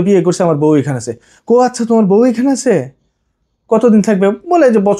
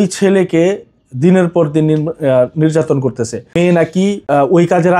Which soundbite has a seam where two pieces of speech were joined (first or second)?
second